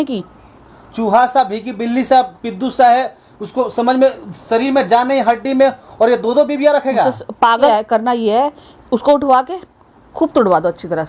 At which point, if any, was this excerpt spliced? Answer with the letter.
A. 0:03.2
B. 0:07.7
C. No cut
B